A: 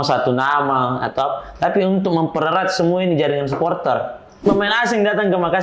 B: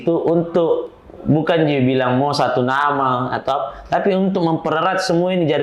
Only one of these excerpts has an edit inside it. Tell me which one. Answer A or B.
A